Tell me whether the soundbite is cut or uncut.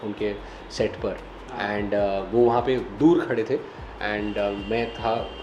uncut